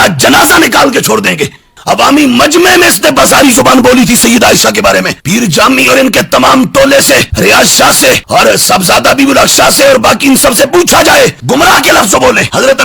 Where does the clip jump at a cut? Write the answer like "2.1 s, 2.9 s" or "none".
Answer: 1.5 s, 11.4 s